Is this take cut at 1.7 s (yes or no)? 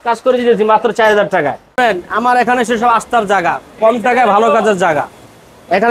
yes